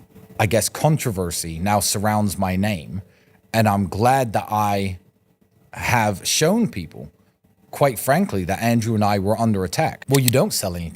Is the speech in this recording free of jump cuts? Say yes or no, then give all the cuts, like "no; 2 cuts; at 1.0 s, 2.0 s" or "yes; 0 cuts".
no; 1 cut; at 10.0 s